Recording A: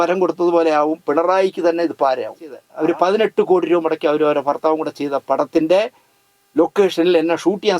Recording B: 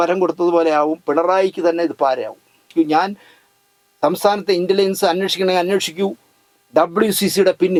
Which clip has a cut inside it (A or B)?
A